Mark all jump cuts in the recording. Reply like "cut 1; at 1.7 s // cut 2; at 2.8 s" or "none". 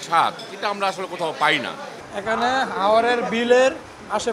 cut 1; at 2.0 s